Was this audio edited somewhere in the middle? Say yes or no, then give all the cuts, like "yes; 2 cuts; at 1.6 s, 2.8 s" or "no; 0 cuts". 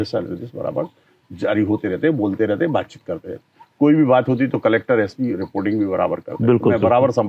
no; 0 cuts